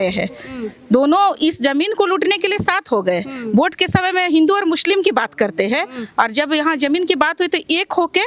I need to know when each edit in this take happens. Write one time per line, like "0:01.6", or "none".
none

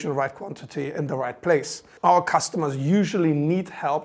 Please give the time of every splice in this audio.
0:01.8

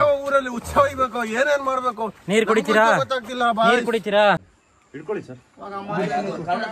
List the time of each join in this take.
0:04.6

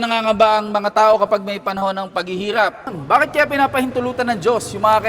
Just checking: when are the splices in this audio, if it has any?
0:03.0

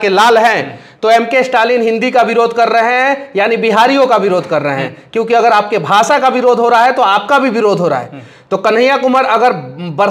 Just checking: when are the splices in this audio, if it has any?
none

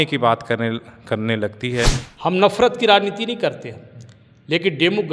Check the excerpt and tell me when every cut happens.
0:02.0

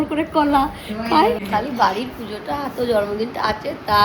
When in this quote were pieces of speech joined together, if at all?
0:01.4

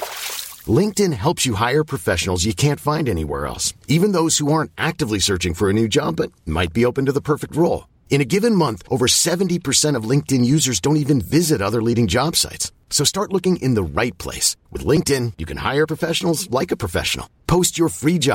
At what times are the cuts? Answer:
none

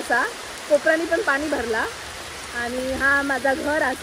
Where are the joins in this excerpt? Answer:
none

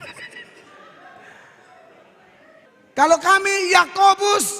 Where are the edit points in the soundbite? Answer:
0:02.7

